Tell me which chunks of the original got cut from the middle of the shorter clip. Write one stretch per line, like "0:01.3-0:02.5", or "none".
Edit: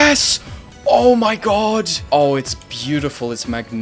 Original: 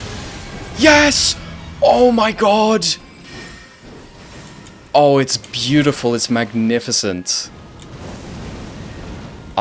0:02.9-0:04.8